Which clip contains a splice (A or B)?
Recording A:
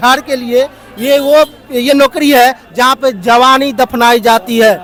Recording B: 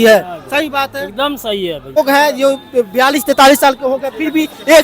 B